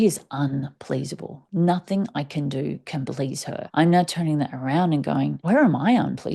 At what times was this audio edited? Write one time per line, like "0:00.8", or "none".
0:03.7
0:05.4